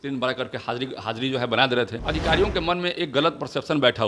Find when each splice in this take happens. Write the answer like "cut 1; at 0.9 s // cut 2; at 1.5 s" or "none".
cut 1; at 2.0 s